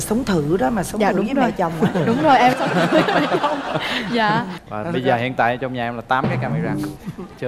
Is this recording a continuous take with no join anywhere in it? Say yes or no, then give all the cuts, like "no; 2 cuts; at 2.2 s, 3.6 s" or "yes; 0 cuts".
no; 1 cut; at 4.6 s